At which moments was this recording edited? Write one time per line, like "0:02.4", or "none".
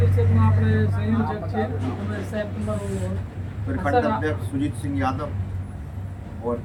none